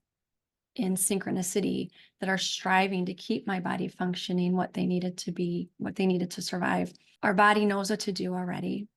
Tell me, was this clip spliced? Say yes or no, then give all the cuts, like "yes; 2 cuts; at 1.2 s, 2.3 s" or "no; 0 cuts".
yes; 1 cut; at 7.0 s